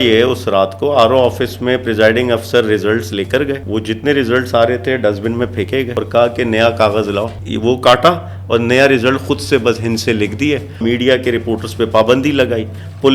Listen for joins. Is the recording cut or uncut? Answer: cut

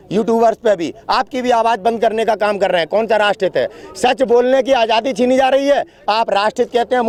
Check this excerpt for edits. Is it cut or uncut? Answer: uncut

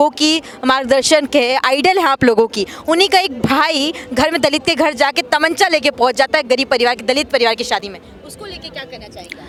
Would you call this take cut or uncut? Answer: uncut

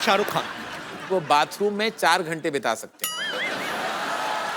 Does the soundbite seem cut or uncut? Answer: cut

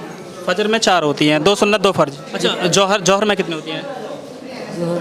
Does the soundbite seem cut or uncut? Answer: cut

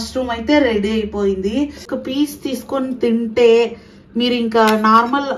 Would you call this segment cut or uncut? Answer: cut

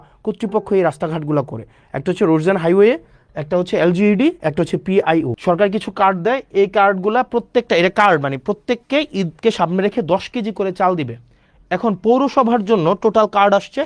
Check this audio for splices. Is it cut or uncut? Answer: cut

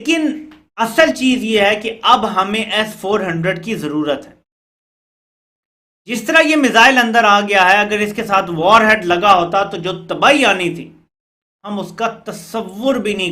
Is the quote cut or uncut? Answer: uncut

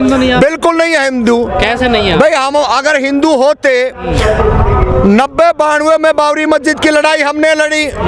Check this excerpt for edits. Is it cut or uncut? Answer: uncut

